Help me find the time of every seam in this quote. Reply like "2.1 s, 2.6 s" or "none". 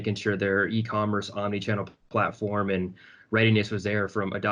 none